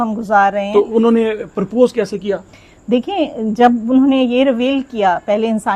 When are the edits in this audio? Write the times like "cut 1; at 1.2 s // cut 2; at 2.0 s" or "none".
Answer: none